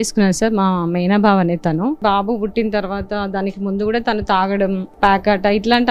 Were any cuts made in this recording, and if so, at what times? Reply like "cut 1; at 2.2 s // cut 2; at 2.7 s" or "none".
cut 1; at 2.0 s // cut 2; at 4.9 s